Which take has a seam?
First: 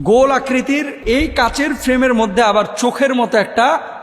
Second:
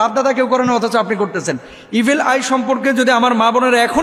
first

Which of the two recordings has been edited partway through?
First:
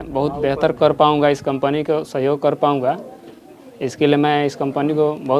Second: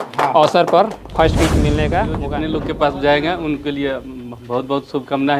second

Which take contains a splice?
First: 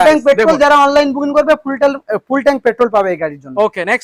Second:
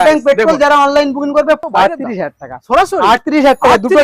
second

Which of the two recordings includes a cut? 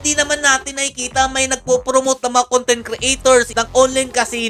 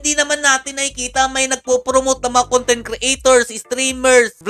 first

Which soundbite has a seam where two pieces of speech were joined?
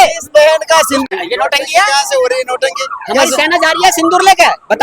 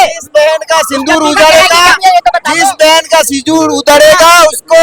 first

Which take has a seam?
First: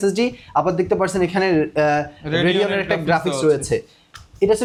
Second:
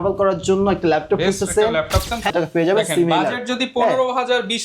second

